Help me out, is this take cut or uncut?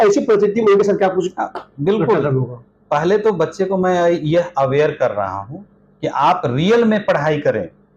uncut